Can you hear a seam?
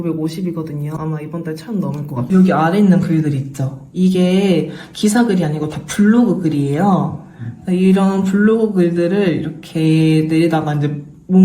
yes; 2 cuts; at 1.0 s, 2.2 s

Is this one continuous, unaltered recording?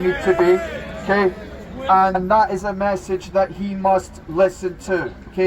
no; 1 cut; at 2.2 s

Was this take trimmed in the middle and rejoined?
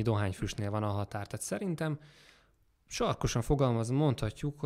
no; 0 cuts

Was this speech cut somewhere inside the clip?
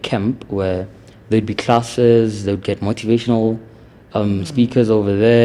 no; 0 cuts

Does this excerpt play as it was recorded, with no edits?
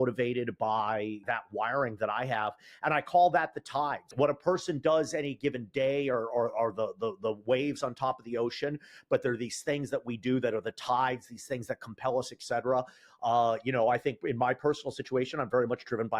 no; 2 cuts; at 1.2 s, 4.1 s

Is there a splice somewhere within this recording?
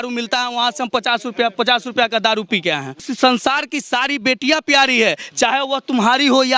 yes; 1 cut; at 3.1 s

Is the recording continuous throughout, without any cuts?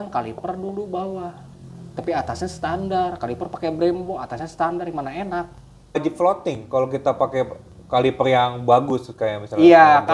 no; 1 cut; at 6.0 s

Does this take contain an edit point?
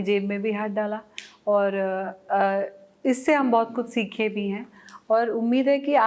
no; 0 cuts

